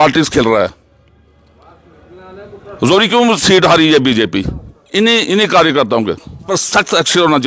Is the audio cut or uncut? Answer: cut